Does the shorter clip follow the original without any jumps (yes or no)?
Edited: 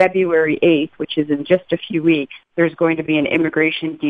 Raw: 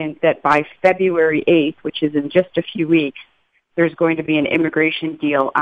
no